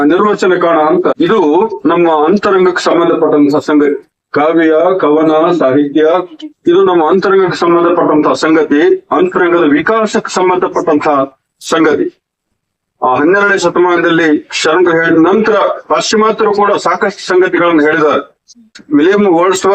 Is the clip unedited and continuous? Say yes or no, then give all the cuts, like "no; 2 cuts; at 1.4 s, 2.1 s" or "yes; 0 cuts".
no; 2 cuts; at 1.1 s, 18.8 s